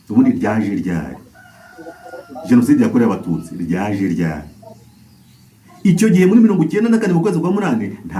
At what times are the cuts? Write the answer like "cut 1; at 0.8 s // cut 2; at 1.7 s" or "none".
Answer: none